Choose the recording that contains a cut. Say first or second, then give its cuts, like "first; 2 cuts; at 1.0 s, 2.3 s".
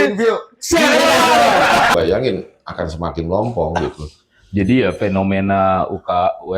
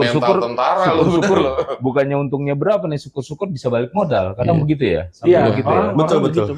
first; 1 cut; at 1.9 s